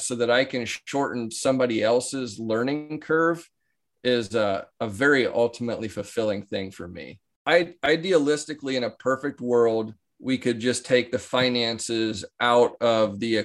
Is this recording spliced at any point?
yes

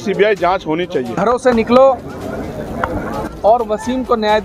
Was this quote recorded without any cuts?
no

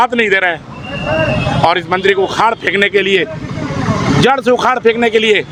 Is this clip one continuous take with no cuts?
yes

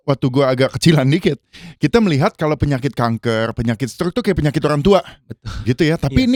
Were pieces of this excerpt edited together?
no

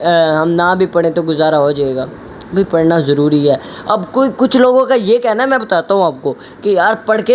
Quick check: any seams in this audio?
no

